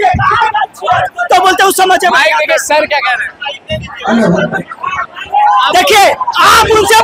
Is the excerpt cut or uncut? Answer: uncut